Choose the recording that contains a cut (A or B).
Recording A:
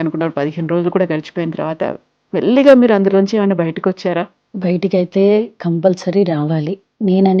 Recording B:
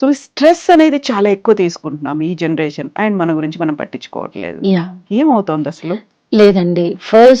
A